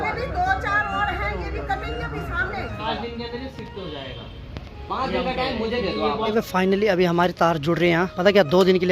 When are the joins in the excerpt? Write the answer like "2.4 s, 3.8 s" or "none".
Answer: 2.8 s, 6.3 s, 8.1 s